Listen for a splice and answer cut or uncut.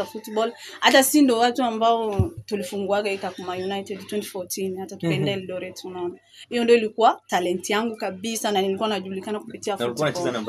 uncut